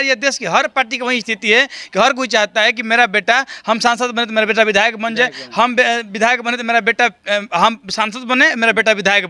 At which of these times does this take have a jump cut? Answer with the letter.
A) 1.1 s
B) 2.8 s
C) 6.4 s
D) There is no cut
D